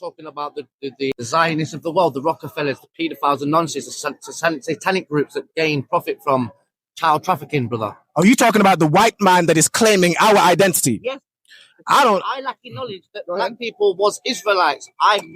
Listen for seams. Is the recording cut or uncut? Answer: cut